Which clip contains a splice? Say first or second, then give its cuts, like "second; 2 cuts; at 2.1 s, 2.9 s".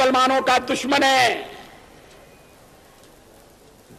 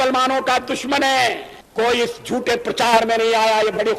second; 1 cut; at 1.5 s